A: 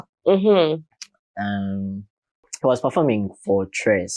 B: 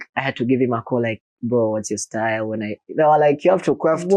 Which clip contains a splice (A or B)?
A